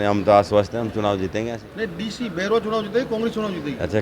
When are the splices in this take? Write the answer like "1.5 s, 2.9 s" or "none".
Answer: 1.7 s